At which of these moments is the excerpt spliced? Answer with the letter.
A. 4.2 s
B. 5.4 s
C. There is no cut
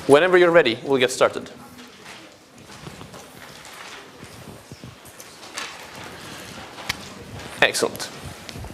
A